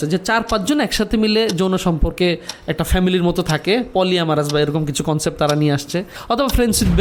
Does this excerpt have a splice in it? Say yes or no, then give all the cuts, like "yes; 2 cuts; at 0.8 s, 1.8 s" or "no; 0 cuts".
no; 0 cuts